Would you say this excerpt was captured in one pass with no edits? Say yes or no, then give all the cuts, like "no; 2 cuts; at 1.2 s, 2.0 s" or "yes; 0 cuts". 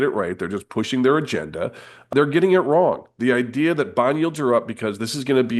no; 1 cut; at 2.1 s